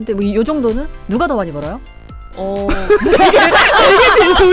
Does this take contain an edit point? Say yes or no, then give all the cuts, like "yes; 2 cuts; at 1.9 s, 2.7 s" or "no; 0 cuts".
no; 0 cuts